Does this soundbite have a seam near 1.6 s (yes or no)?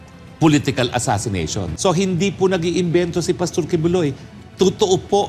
yes